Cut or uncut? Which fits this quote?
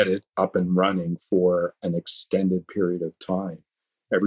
uncut